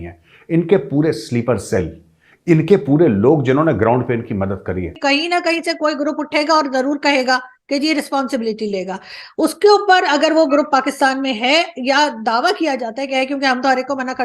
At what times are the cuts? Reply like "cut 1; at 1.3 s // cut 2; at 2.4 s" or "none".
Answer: cut 1; at 4.9 s